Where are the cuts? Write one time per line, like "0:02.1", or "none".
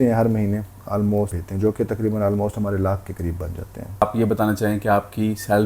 0:01.3
0:04.0